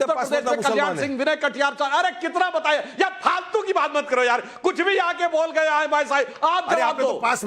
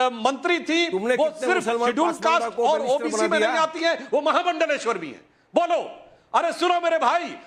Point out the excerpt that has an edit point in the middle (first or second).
first